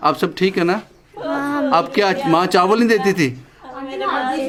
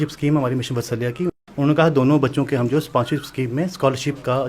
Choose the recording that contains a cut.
second; 1 cut; at 1.4 s

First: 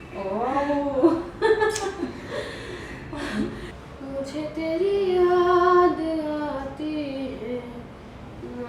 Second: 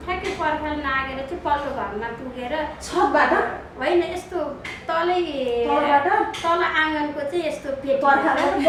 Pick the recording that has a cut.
first; 1 cut; at 3.7 s

